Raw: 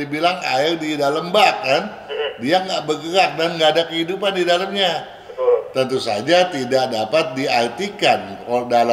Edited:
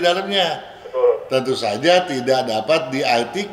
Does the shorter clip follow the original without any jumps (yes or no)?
yes